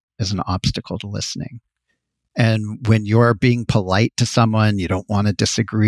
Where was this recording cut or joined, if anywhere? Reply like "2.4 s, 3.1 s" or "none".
none